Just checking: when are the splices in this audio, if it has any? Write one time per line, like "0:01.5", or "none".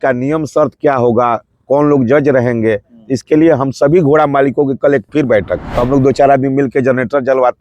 0:05.6